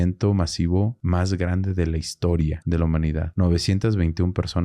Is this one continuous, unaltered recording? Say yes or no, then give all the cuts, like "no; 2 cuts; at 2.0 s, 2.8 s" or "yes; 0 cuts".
no; 2 cuts; at 1.0 s, 3.0 s